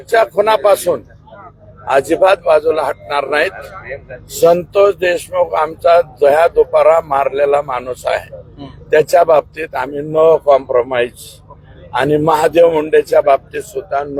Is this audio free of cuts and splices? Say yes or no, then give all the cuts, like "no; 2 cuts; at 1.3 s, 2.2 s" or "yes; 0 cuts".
yes; 0 cuts